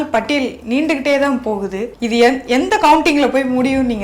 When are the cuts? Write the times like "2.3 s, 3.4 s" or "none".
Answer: 1.9 s